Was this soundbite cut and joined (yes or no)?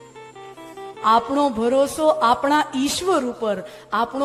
no